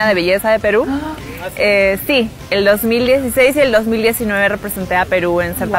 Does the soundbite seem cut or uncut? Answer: uncut